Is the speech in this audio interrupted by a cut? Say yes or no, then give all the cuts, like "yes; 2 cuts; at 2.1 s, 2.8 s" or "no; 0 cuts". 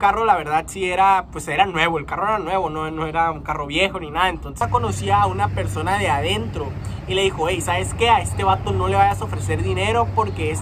yes; 1 cut; at 4.6 s